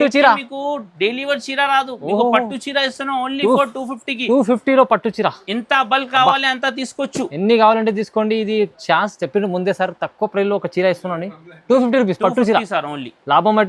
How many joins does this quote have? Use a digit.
0